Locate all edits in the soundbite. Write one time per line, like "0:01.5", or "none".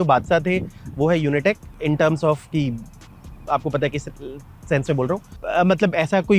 0:01.7
0:05.4